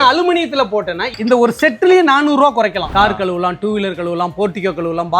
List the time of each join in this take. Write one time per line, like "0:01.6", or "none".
0:02.8